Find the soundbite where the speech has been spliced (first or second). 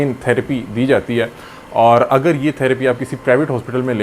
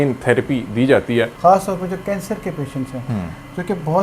second